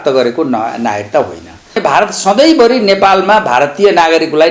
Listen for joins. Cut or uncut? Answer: cut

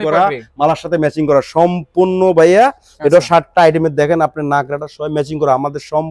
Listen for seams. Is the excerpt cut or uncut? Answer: uncut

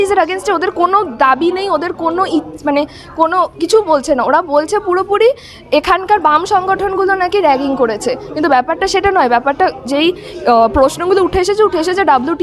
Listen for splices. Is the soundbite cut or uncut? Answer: uncut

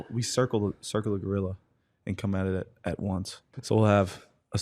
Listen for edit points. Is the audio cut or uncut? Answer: cut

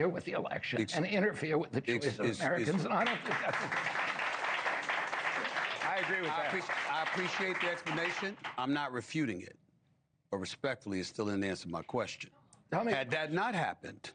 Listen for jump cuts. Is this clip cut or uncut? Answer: uncut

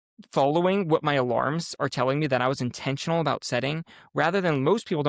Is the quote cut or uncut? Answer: uncut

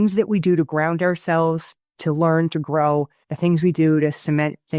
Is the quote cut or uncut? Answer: cut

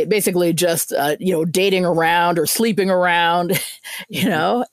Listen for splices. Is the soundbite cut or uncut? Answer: uncut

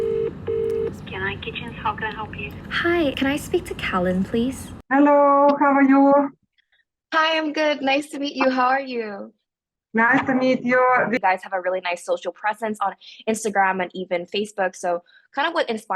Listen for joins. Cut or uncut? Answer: cut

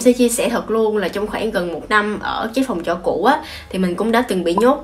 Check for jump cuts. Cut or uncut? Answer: uncut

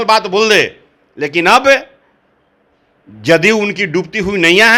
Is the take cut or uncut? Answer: uncut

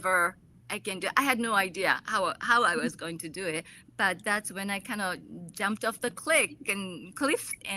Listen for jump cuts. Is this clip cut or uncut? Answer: uncut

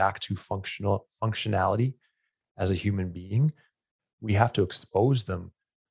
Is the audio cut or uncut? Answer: uncut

